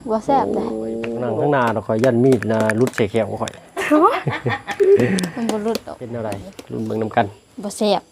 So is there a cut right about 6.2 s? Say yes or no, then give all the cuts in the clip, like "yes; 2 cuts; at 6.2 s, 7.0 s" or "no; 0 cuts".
yes; 2 cuts; at 1.2 s, 6.2 s